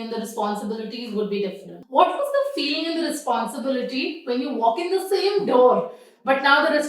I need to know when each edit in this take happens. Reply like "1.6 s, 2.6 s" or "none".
1.7 s